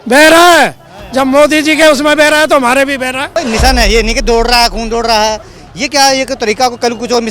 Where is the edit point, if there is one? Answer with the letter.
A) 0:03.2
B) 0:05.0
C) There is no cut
A